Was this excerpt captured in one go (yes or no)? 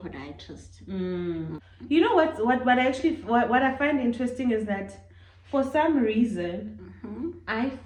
yes